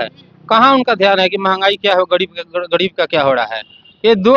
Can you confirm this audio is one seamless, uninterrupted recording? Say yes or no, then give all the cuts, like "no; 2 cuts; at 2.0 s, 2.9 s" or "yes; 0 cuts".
yes; 0 cuts